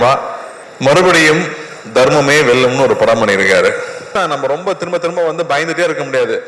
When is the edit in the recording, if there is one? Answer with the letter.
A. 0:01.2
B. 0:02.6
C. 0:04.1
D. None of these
C